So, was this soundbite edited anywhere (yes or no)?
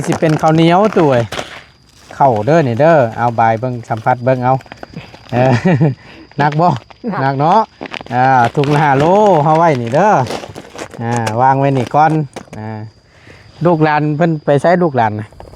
no